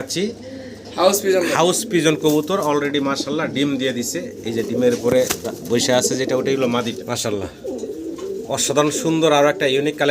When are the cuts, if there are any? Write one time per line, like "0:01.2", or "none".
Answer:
0:06.9